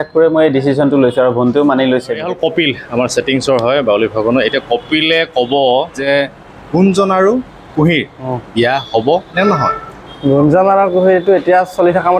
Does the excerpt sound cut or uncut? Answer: uncut